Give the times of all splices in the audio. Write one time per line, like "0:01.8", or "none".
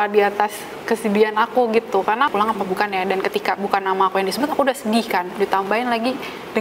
0:02.3